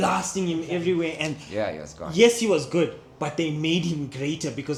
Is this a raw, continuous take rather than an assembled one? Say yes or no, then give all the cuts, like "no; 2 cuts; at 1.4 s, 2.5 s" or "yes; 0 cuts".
yes; 0 cuts